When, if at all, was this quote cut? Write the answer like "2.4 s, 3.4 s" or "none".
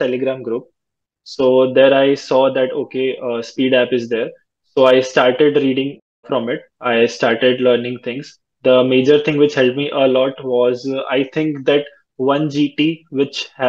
none